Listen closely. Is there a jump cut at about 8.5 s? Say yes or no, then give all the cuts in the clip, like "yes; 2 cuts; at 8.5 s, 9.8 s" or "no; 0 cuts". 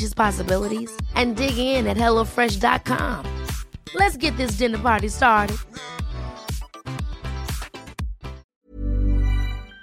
yes; 1 cut; at 8.5 s